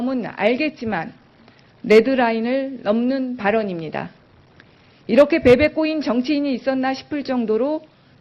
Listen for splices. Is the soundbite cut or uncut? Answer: cut